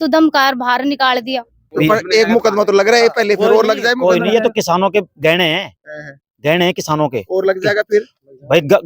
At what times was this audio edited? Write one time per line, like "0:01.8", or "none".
0:01.7